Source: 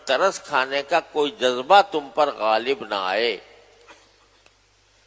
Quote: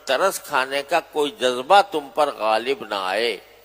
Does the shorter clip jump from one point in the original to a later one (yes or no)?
no